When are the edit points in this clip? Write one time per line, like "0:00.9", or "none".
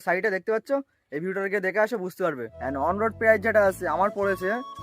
0:02.5